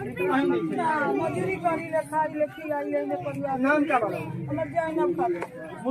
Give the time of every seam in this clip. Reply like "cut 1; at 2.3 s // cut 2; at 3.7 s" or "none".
none